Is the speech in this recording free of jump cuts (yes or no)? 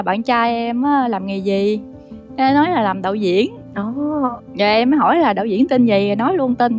yes